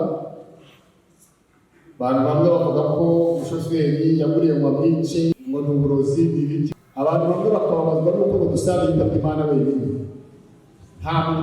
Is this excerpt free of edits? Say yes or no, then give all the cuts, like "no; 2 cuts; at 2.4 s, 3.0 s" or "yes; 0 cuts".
no; 2 cuts; at 5.4 s, 6.7 s